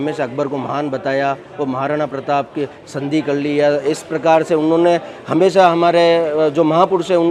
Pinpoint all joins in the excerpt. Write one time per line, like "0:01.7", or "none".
none